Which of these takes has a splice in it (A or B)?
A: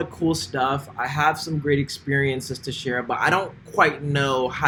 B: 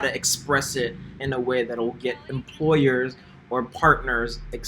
B